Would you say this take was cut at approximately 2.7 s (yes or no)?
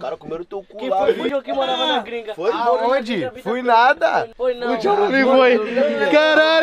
no